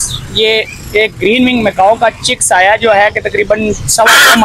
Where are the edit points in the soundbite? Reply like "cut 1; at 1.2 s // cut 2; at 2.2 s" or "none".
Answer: none